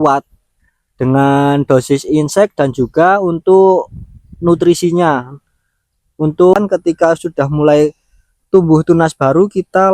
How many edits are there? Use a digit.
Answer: 1